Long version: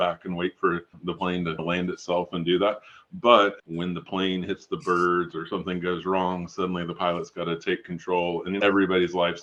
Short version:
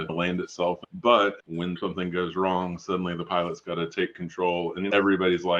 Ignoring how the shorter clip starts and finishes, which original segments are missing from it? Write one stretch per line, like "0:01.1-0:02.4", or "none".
0:02.3-0:03.0
0:04.0-0:05.5